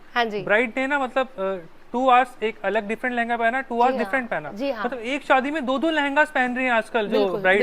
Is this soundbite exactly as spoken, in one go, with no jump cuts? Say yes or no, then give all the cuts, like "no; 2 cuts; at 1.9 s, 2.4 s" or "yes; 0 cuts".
yes; 0 cuts